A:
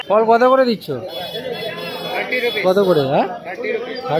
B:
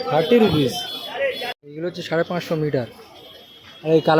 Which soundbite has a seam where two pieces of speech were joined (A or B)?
B